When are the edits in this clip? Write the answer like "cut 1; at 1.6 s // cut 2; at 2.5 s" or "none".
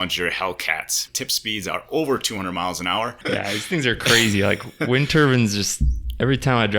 cut 1; at 1.0 s // cut 2; at 3.2 s